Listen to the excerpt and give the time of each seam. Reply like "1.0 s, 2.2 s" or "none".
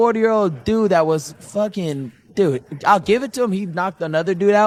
none